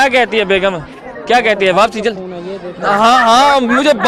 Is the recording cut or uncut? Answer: uncut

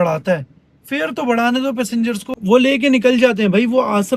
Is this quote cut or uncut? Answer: cut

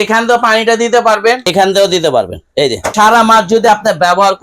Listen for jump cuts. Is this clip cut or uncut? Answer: cut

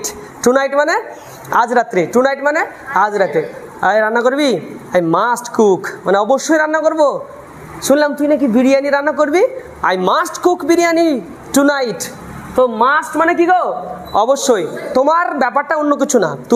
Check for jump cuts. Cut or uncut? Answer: uncut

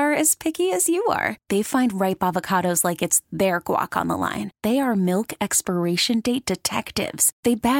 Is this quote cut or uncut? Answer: uncut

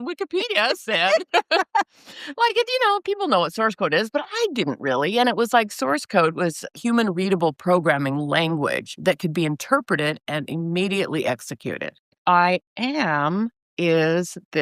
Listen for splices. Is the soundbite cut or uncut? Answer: cut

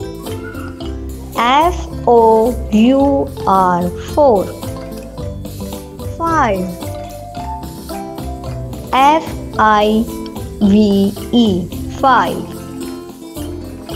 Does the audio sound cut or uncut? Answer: cut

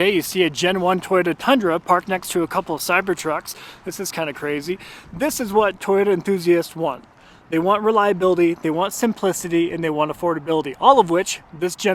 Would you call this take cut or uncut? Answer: uncut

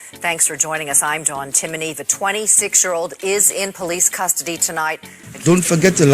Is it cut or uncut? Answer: cut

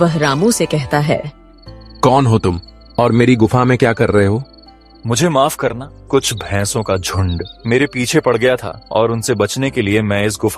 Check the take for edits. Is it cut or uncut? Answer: cut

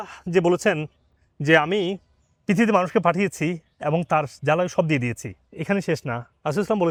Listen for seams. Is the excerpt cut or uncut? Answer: uncut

